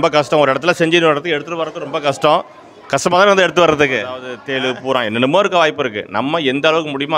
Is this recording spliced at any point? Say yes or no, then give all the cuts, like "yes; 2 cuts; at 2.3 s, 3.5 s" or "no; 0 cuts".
yes; 1 cut; at 4.4 s